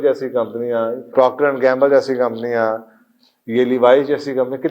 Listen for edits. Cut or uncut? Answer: cut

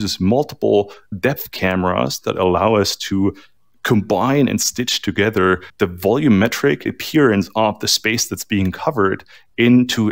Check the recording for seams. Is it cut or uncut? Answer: cut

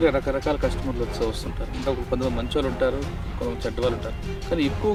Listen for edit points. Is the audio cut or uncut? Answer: uncut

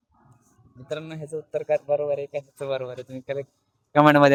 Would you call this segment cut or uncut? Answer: uncut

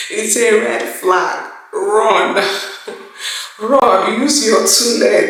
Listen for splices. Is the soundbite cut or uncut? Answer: uncut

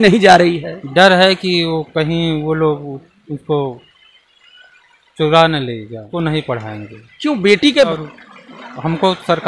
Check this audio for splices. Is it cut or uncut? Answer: cut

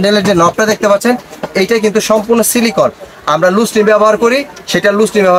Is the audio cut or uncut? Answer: uncut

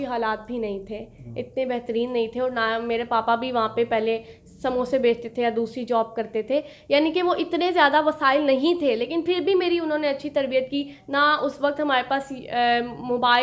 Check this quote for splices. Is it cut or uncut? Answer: uncut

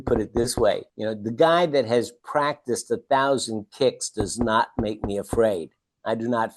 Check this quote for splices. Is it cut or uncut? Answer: cut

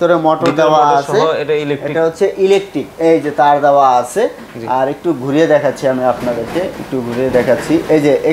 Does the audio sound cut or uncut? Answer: uncut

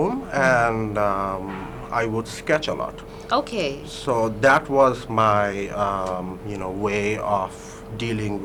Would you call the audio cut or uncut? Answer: uncut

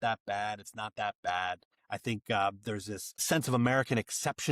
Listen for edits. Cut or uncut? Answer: cut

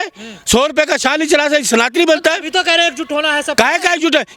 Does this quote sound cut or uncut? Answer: uncut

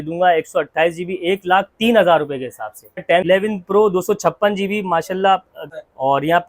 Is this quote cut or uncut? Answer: cut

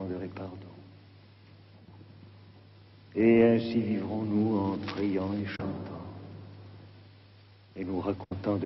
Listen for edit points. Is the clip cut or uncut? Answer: uncut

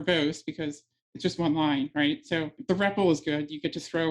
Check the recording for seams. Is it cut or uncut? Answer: cut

